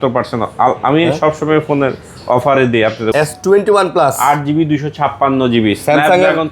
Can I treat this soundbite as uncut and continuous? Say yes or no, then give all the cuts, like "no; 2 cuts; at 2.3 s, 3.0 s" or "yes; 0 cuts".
no; 1 cut; at 3.1 s